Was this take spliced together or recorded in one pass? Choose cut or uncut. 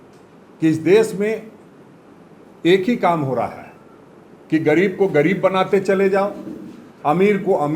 uncut